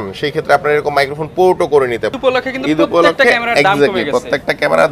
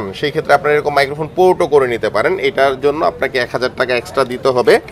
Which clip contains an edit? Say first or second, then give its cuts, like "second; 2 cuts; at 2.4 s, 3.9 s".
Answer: first; 1 cut; at 2.1 s